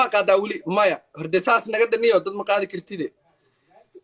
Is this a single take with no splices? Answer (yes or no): yes